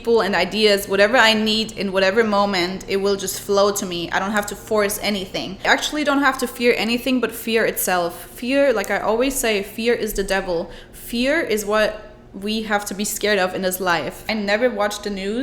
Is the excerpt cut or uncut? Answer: cut